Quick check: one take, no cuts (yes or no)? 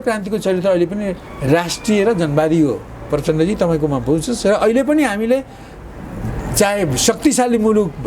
yes